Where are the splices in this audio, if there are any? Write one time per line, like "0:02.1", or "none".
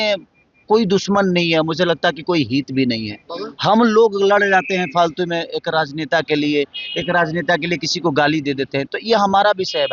none